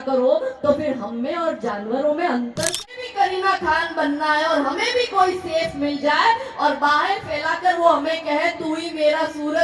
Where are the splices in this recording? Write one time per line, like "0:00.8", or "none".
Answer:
0:02.8